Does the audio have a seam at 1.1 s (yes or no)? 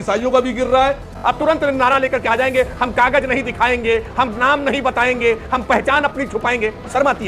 yes